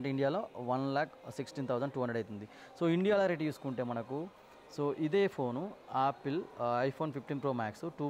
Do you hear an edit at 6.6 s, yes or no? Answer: no